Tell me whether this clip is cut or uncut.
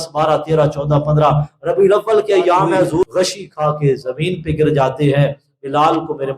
cut